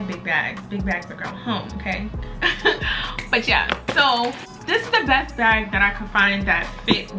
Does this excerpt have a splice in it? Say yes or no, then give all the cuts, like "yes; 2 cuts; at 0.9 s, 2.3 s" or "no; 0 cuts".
no; 0 cuts